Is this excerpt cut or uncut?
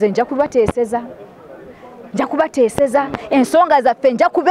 uncut